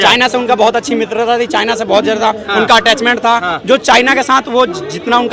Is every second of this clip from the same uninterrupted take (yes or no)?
yes